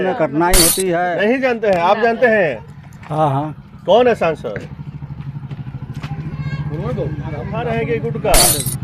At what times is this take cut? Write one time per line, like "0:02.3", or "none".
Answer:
0:01.1
0:07.6

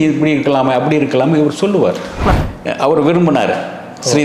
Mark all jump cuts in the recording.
0:02.2

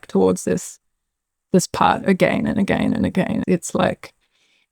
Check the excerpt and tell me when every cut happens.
0:03.4

